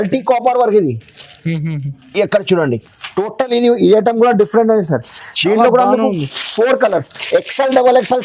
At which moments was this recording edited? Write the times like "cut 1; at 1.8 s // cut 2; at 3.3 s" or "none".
none